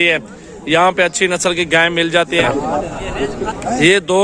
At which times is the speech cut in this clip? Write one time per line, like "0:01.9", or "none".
0:02.4